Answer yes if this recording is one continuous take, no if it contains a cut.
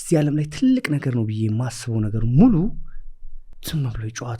yes